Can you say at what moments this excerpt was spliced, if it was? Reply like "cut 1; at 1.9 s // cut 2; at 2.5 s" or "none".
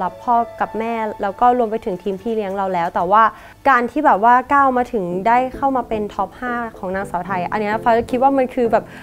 cut 1; at 1.1 s // cut 2; at 3.5 s